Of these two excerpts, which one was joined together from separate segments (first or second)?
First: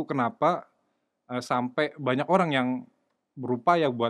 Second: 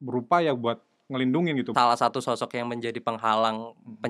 second